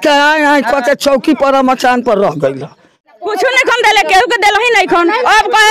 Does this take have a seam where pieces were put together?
yes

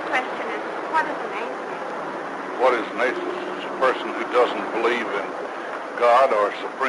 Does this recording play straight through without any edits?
yes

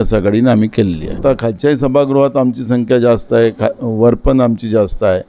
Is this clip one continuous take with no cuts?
no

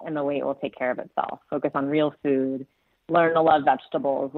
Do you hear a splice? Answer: no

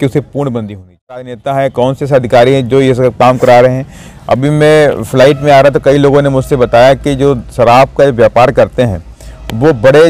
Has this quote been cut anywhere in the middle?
yes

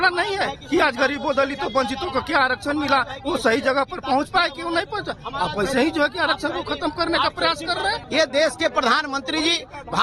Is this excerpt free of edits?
no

